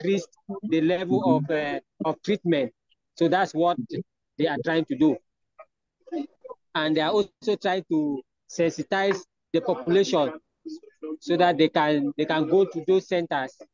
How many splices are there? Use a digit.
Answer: 0